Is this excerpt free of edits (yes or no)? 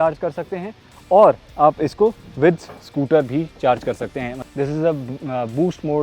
no